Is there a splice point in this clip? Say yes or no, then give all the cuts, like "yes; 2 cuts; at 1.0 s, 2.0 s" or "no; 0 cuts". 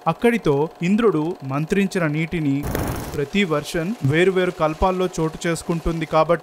yes; 1 cut; at 2.7 s